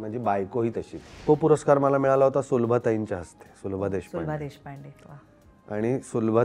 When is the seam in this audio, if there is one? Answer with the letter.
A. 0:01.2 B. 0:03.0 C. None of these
A